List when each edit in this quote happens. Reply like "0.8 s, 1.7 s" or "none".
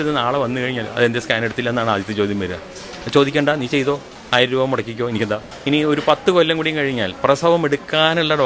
4.1 s, 5.5 s

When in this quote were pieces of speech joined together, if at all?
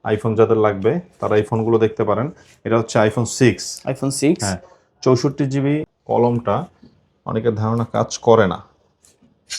5.9 s

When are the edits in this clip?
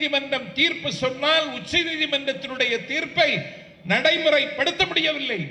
none

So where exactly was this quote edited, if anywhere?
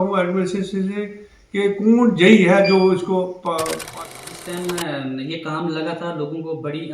3.9 s

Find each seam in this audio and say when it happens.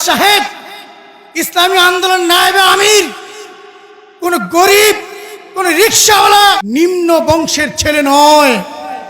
6.6 s

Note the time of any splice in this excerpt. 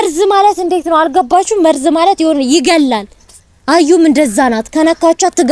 none

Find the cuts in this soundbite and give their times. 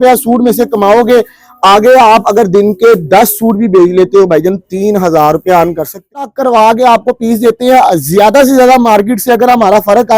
6.1 s

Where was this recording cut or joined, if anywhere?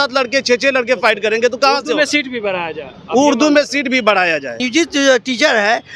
4.6 s

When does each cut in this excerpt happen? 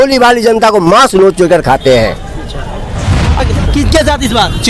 3.4 s

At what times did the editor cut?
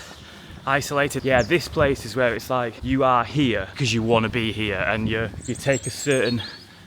1.1 s, 2.8 s, 3.7 s, 5.4 s

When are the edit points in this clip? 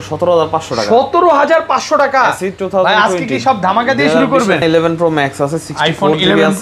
4.6 s

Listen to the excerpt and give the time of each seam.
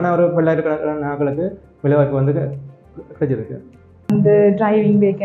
4.1 s

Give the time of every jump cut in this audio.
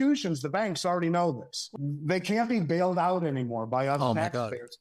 1.6 s

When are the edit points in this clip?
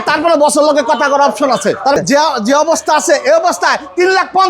2.0 s

